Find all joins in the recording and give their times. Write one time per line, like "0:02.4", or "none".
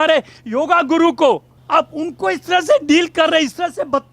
0:01.5